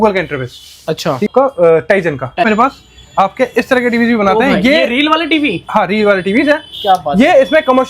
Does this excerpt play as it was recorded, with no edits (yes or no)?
no